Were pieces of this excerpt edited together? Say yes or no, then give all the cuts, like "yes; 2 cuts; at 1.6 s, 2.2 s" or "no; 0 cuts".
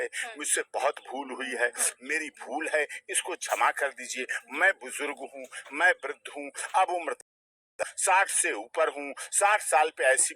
no; 0 cuts